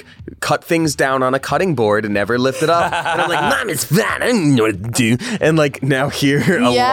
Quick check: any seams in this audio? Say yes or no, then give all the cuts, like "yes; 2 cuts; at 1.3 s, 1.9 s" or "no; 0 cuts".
no; 0 cuts